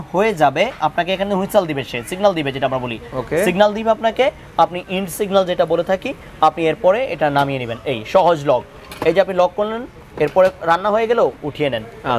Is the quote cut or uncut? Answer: uncut